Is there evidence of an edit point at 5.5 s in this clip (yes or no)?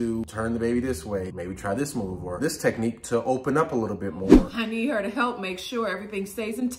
no